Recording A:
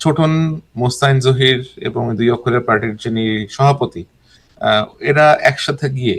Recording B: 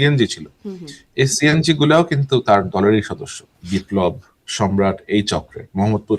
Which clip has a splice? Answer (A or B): B